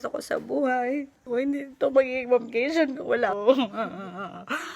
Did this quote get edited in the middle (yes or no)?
yes